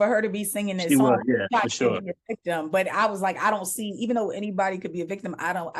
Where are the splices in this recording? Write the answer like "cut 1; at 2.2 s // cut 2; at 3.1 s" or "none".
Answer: none